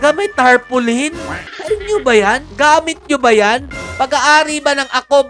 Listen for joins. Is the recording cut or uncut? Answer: cut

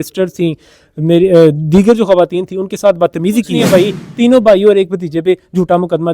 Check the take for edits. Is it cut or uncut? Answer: cut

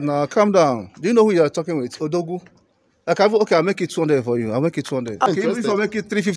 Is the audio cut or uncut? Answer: cut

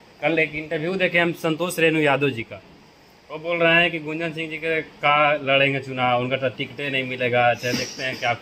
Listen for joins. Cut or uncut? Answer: uncut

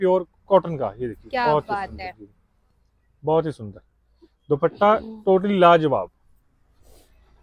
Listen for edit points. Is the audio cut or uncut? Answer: uncut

